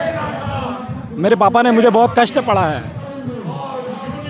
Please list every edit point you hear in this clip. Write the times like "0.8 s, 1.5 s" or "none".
none